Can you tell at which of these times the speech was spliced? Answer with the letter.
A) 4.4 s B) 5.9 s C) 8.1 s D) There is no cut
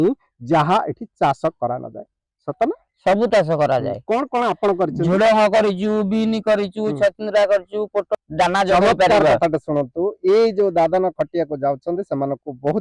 C